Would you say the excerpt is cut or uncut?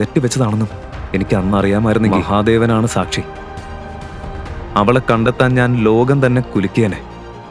uncut